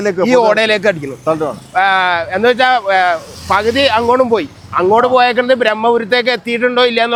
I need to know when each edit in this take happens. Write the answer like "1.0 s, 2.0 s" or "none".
none